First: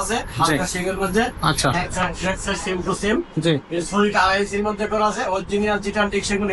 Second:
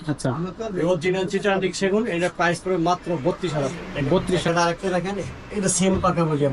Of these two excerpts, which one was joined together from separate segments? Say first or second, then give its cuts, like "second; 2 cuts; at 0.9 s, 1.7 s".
second; 1 cut; at 4.4 s